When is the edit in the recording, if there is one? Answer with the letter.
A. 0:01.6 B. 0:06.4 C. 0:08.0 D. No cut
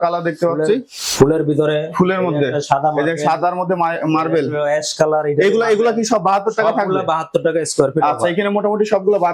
D